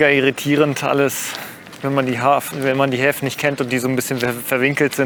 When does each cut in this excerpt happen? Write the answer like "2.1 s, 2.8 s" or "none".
none